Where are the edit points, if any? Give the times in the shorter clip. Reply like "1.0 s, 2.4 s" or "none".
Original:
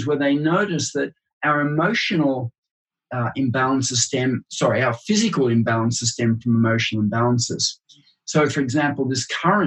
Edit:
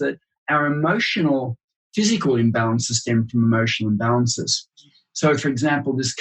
1.9 s